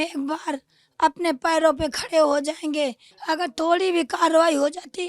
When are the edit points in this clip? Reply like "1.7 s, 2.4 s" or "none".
3.1 s